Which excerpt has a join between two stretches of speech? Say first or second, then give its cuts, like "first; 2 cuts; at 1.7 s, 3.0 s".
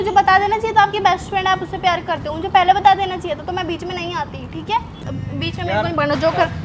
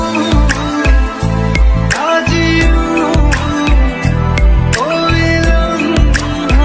first; 1 cut; at 5.0 s